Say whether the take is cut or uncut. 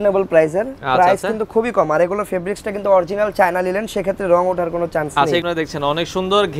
cut